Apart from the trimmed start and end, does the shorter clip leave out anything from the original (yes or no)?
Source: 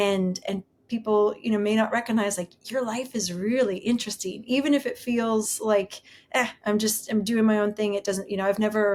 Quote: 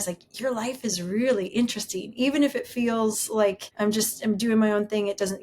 yes